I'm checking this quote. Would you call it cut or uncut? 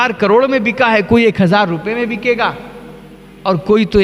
uncut